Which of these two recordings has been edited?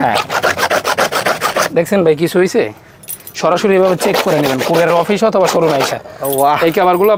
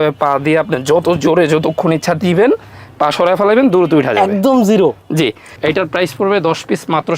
second; 1 cut; at 5.5 s

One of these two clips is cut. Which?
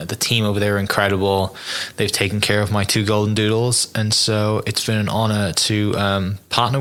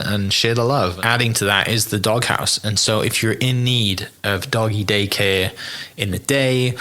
second; 1 cut; at 1.0 s

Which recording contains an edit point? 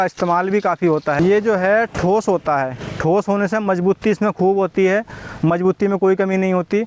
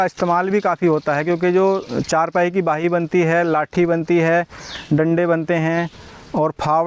first; 1 cut; at 1.2 s

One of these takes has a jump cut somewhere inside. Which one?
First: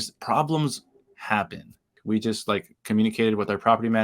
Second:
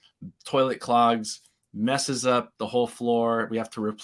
first; 1 cut; at 1.9 s

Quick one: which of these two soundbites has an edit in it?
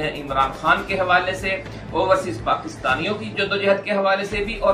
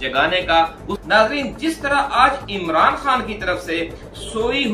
second; 1 cut; at 1.0 s

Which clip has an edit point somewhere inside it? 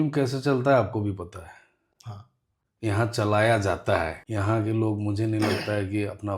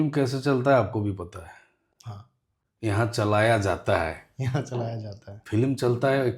first; 1 cut; at 4.2 s

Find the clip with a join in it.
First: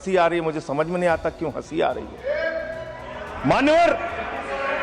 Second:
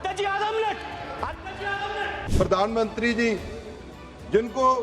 second; 1 cut; at 2.2 s

